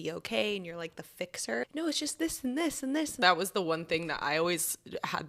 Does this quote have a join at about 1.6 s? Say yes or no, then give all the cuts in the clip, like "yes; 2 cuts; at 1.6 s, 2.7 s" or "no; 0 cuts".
yes; 2 cuts; at 1.6 s, 3.2 s